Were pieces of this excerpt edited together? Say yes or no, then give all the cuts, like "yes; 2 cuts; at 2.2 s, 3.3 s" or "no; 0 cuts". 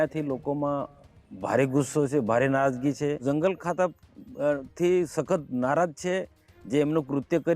yes; 1 cut; at 3.2 s